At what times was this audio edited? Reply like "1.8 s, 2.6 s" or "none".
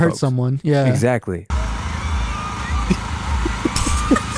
1.5 s